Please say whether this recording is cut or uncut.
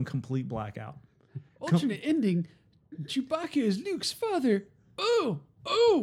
uncut